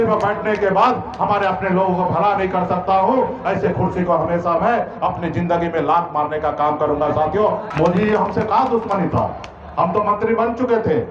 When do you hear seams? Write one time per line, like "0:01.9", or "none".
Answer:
0:07.7